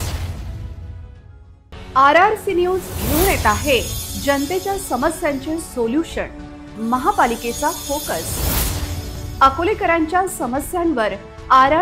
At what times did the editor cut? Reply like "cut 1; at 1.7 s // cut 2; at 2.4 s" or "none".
cut 1; at 1.1 s